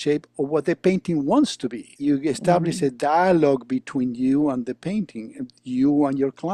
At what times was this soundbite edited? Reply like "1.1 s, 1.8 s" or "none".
1.9 s